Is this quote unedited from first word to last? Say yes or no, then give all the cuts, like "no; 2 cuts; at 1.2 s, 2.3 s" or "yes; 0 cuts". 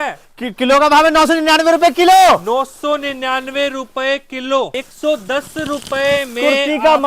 no; 1 cut; at 4.7 s